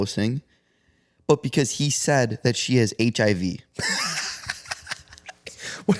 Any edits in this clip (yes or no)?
no